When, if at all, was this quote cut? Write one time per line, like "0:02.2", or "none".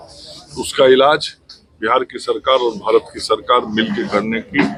none

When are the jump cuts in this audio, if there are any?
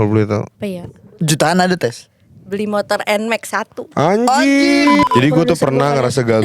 0:05.0

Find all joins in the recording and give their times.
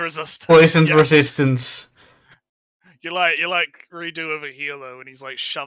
none

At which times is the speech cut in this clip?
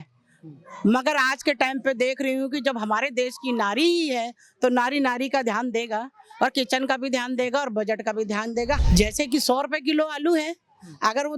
0:08.8

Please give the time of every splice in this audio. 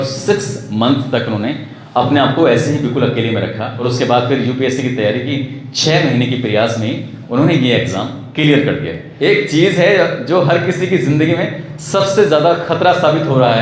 0:03.7
0:09.0

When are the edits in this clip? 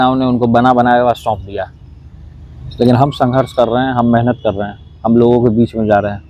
none

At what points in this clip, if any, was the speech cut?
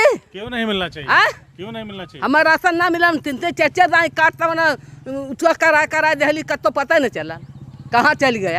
none

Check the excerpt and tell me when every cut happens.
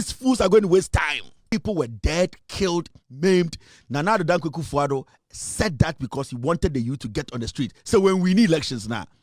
0:01.5

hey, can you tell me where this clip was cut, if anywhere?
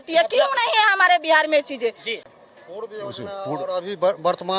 0:02.1

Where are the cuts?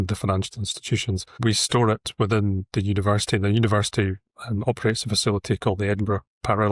0:01.4

